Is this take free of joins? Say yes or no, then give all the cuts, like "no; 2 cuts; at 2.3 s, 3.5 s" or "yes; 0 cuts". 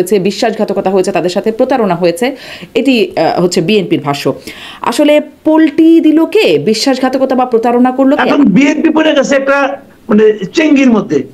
no; 1 cut; at 8.2 s